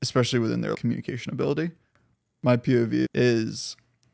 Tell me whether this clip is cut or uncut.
cut